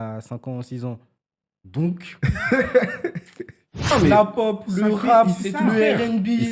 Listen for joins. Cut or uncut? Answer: cut